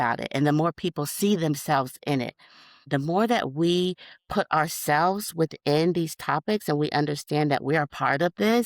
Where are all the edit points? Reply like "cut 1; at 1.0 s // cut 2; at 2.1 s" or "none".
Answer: cut 1; at 2.9 s